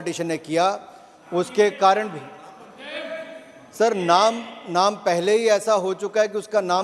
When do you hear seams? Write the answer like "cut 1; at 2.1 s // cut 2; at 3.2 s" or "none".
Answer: none

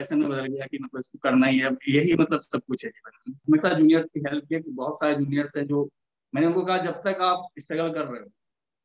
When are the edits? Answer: cut 1; at 3.4 s

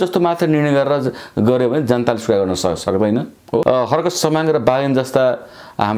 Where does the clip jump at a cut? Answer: cut 1; at 3.6 s

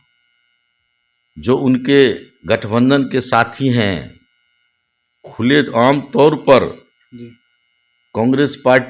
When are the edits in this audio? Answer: none

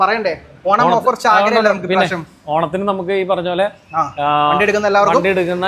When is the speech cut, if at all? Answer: none

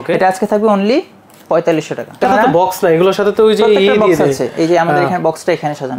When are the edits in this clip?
cut 1; at 2.2 s

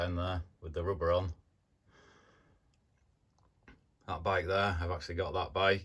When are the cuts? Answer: none

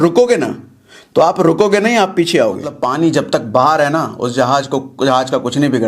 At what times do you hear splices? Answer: cut 1; at 2.8 s

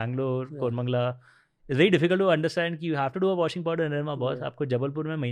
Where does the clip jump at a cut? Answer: none

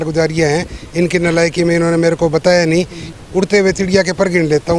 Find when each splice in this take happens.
cut 1; at 3.1 s

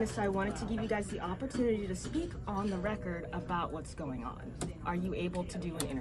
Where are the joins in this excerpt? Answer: none

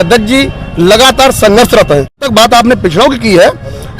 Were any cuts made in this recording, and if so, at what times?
cut 1; at 2.3 s

